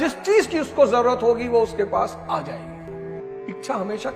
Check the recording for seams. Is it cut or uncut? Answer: cut